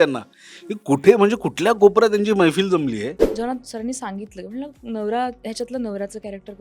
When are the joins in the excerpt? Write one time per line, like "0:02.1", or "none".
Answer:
0:03.2